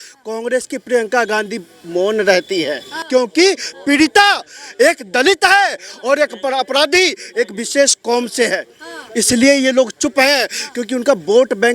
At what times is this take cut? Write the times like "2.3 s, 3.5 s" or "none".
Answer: 2.9 s